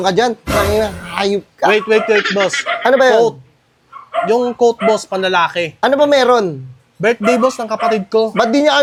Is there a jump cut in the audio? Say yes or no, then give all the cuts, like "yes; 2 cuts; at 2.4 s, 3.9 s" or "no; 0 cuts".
no; 0 cuts